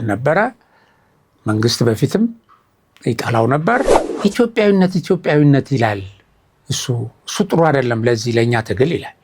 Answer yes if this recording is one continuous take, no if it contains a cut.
no